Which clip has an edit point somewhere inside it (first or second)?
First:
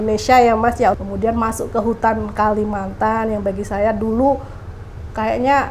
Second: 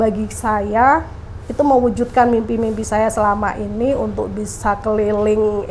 first